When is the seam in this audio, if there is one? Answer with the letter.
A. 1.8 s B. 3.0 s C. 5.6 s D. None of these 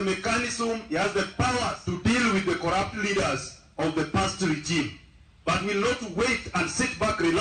A